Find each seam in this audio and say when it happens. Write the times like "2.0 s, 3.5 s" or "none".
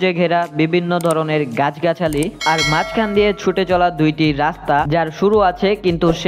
none